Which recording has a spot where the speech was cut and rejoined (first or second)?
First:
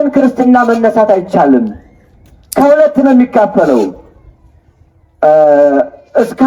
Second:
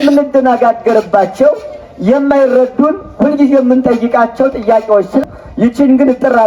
second